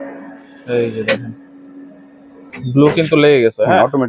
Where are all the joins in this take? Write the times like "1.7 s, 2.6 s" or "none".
2.5 s